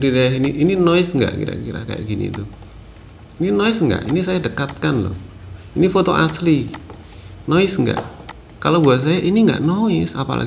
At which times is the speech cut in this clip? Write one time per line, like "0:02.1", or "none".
none